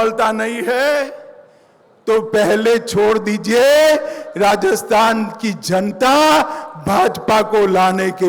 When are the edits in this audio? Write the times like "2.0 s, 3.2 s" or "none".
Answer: none